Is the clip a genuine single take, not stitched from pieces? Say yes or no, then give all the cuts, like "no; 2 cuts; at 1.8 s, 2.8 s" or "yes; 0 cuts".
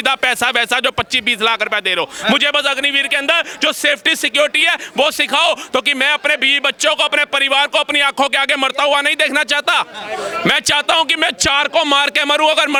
yes; 0 cuts